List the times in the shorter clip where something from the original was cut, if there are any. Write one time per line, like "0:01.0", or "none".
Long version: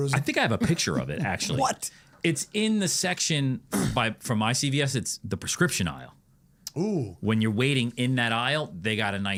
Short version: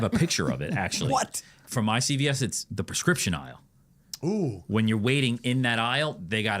0:01.6